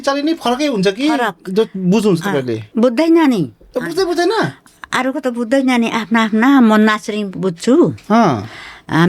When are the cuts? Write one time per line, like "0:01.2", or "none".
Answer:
0:02.6